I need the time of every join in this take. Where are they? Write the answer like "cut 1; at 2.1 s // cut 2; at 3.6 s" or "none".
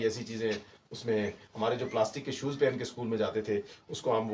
none